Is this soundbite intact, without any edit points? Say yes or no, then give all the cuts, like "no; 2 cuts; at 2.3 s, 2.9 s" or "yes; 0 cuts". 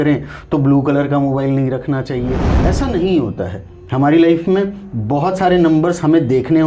no; 1 cut; at 2.5 s